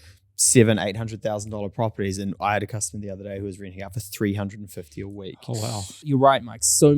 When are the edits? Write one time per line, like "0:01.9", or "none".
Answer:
0:05.9